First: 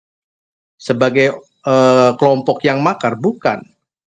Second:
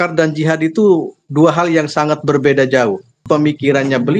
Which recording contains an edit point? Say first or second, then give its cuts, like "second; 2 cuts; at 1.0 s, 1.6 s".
second; 1 cut; at 3.2 s